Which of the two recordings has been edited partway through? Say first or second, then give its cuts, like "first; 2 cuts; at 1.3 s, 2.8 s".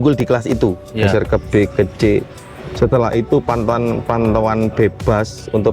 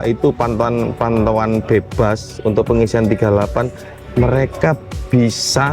first; 1 cut; at 1.0 s